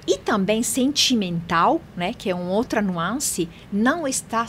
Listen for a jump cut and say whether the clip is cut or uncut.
uncut